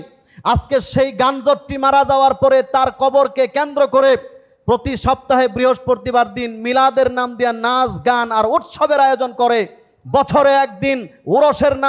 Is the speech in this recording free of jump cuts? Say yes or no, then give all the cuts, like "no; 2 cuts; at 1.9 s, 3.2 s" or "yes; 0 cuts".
yes; 0 cuts